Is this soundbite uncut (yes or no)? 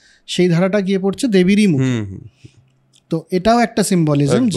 yes